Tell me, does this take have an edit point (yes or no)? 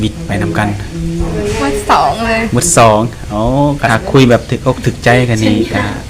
yes